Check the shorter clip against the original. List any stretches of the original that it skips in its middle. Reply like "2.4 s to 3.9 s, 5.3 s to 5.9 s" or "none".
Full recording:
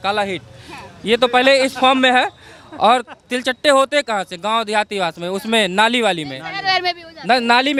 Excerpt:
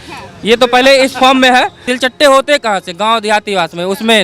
2.4 s to 3.3 s